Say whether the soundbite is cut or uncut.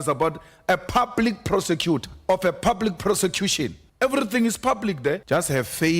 cut